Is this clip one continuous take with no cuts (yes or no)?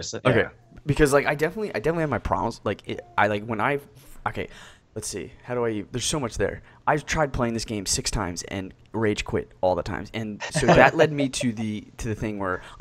no